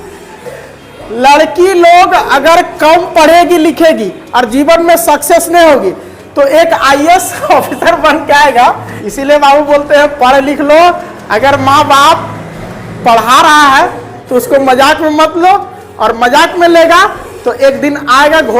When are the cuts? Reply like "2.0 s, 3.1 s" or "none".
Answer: 8.9 s